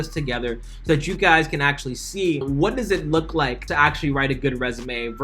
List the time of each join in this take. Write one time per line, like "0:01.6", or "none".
0:02.4
0:03.6